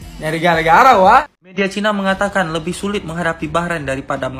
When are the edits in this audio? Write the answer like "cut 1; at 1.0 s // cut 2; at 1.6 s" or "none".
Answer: cut 1; at 1.2 s